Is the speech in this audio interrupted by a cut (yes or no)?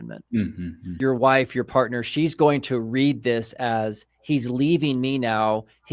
yes